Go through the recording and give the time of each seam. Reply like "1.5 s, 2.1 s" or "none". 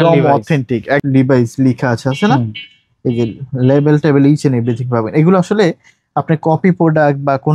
1.0 s